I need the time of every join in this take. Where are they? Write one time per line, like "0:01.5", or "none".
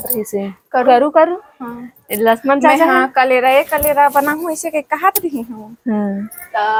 none